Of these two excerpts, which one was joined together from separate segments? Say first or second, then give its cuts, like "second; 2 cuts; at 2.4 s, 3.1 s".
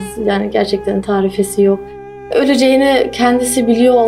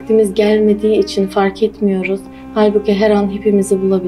first; 1 cut; at 2.3 s